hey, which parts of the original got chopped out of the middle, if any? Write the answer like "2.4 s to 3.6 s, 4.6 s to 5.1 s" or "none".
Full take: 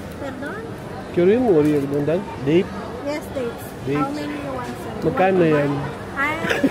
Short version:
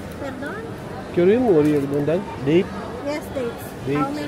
none